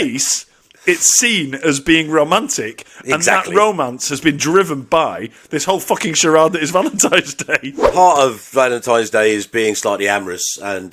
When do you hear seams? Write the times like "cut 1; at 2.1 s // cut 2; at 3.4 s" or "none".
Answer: cut 1; at 7.8 s